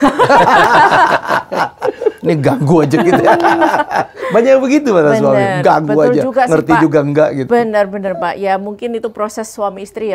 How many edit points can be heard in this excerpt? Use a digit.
0